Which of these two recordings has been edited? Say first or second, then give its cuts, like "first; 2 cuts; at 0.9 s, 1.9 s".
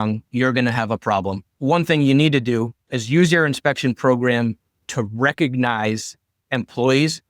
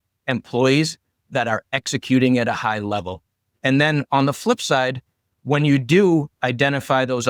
first; 1 cut; at 1.5 s